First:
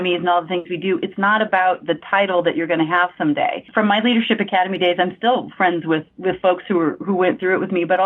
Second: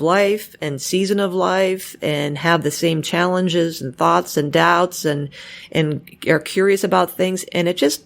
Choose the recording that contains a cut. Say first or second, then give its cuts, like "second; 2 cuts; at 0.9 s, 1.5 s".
first; 1 cut; at 3.7 s